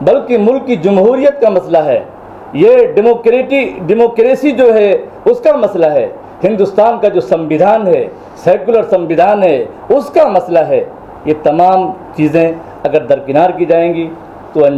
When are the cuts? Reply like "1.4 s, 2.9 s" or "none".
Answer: none